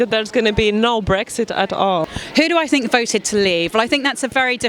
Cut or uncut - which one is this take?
cut